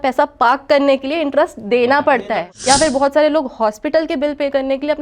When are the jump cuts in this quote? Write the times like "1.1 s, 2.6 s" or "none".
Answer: 2.5 s